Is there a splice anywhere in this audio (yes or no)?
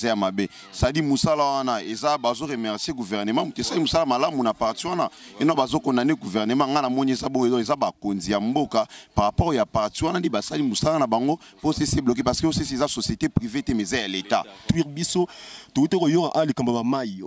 yes